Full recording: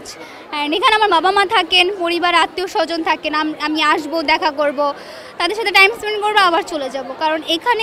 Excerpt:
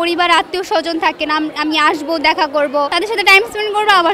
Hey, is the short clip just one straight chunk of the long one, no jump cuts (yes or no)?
no